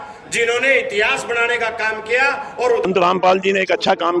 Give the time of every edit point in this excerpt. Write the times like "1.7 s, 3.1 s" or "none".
2.8 s